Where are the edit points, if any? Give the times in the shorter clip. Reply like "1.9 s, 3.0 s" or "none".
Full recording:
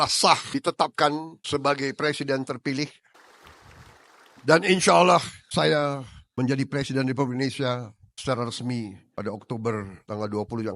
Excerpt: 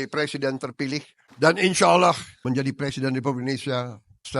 1.2 s, 2.3 s